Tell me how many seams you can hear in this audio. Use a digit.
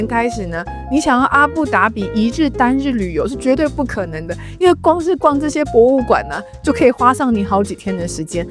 0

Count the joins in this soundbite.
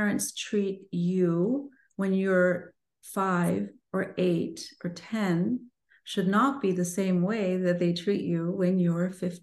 0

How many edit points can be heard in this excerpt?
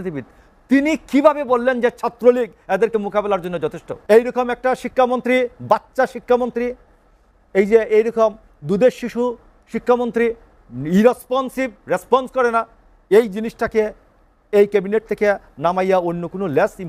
1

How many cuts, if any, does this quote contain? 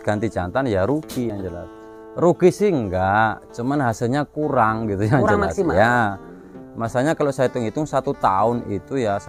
0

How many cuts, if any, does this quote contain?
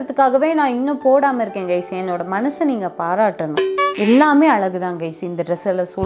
1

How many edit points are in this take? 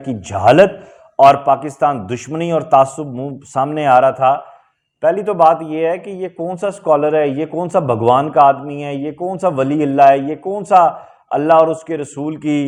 0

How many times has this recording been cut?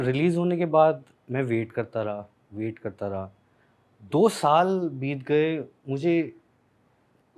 0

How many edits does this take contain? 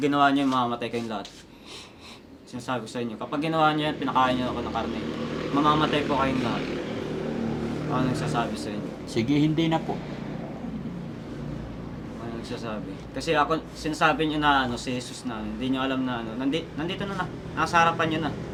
0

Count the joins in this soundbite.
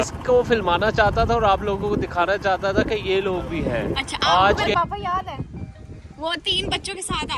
1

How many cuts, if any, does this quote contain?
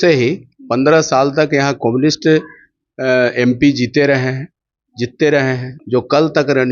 1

